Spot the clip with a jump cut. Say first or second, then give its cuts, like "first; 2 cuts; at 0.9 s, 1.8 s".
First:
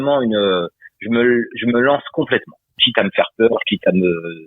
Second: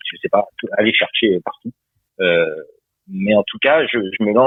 first; 1 cut; at 2.8 s